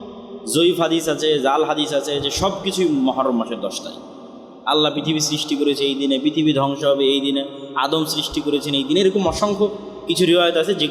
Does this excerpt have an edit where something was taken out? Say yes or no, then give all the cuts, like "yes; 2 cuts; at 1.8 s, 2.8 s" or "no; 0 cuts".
no; 0 cuts